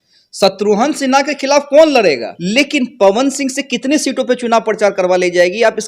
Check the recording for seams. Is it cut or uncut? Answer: cut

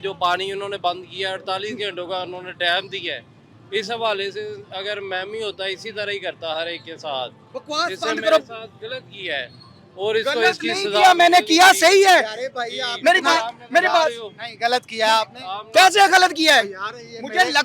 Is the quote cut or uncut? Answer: uncut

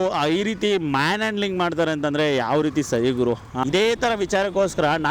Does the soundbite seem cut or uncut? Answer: cut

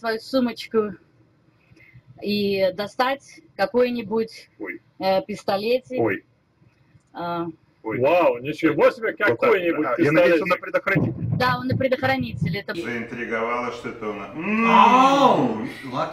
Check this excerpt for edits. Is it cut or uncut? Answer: cut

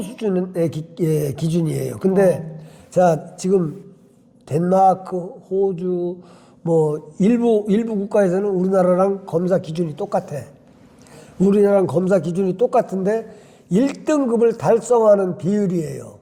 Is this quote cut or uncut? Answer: uncut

